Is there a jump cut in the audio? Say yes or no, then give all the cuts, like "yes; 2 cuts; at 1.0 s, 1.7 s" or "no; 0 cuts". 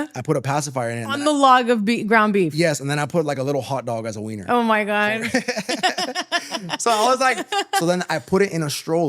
no; 0 cuts